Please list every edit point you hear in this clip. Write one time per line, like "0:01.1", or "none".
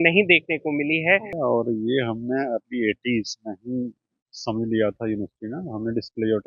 0:01.3